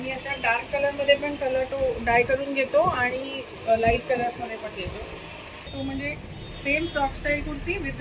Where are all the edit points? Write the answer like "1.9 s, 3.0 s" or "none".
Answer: 5.7 s